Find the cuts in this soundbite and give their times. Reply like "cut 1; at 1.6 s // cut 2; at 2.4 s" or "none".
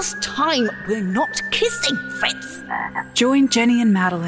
cut 1; at 3.0 s